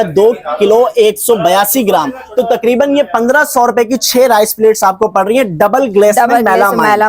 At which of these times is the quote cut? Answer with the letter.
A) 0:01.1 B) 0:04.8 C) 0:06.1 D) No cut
D